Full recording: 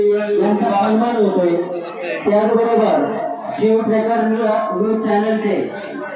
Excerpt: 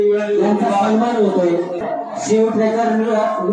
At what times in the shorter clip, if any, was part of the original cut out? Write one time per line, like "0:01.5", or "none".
0:01.9

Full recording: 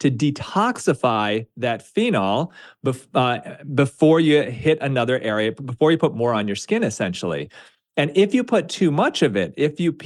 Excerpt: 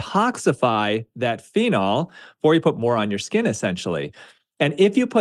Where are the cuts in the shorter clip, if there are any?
0:02.3

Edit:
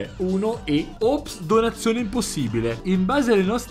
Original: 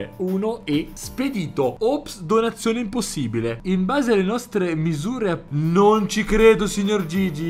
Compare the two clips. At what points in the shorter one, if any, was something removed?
0:01.0

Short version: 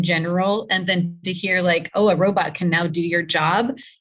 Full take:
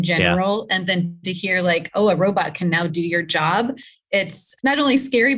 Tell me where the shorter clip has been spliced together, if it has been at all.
none

